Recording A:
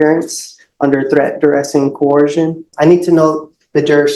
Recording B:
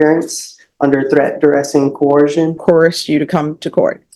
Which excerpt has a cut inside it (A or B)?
A